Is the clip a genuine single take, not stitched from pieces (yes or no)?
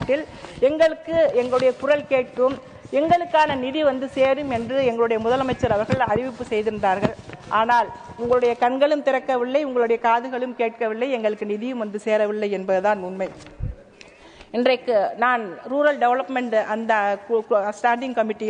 yes